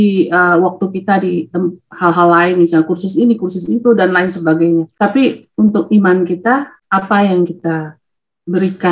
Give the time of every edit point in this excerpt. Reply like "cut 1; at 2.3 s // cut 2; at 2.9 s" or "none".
cut 1; at 4.9 s // cut 2; at 6.8 s